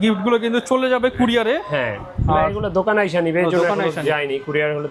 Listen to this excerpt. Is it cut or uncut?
uncut